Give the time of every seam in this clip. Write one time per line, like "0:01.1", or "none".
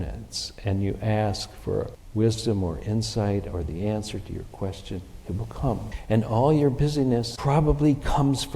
0:02.0
0:05.9
0:07.3